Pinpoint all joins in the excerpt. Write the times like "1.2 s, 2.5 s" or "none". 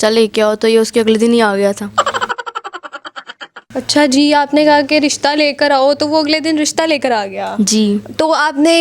none